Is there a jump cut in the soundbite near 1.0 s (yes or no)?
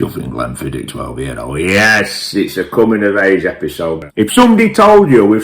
no